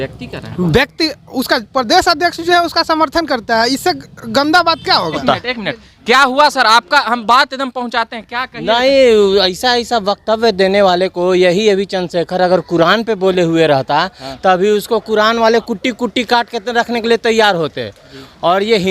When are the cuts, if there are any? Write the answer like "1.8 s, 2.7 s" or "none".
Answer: 5.2 s